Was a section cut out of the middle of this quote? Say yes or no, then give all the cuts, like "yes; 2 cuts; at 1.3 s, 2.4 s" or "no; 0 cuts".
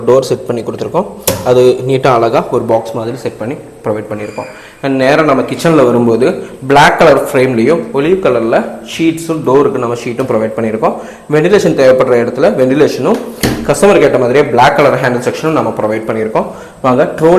no; 0 cuts